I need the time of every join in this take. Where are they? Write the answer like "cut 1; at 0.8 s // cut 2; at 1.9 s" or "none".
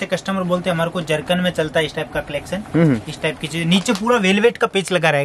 none